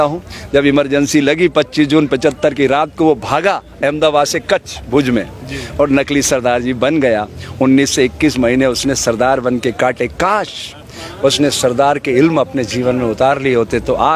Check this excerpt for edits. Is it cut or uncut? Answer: uncut